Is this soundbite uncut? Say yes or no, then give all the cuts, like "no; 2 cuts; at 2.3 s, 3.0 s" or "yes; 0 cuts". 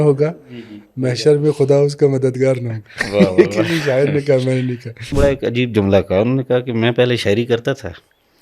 no; 1 cut; at 5.1 s